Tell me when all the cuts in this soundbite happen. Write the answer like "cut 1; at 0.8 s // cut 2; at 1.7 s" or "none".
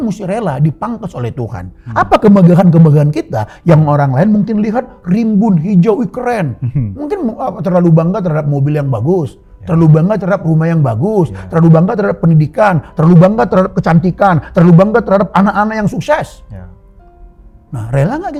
none